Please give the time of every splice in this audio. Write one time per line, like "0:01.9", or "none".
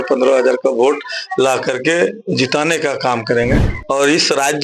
0:03.7